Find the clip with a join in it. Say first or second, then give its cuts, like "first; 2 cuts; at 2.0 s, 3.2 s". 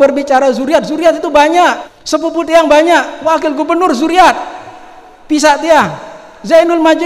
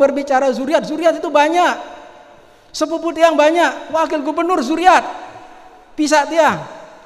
first; 1 cut; at 1.9 s